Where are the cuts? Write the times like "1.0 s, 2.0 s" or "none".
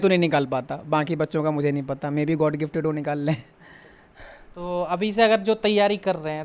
none